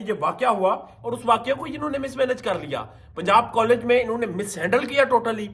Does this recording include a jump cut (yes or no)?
no